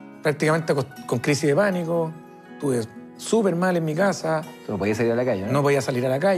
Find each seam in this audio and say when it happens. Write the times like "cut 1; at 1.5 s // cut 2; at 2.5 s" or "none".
none